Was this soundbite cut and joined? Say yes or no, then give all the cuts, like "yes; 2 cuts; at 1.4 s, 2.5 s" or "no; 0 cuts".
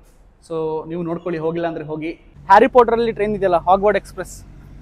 yes; 1 cut; at 2.3 s